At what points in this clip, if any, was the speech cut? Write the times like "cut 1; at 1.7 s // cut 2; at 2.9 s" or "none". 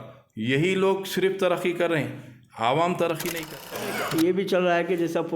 cut 1; at 3.6 s

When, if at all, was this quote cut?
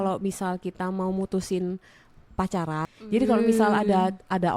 cut 1; at 2.8 s

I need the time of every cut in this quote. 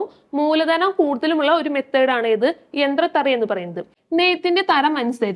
cut 1; at 3.9 s

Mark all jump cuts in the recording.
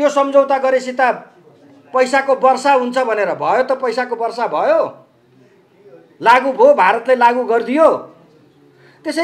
none

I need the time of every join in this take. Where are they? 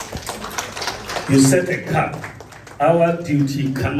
none

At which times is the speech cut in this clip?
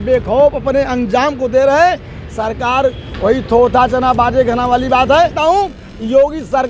cut 1; at 5.4 s

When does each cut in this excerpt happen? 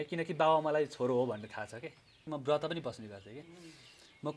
cut 1; at 2.2 s

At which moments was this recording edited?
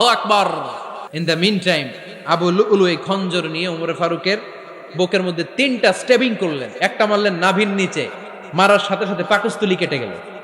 cut 1; at 1.1 s

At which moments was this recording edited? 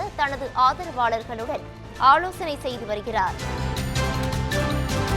cut 1; at 3.4 s

